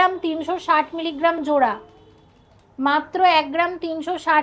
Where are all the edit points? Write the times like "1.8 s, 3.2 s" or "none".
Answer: none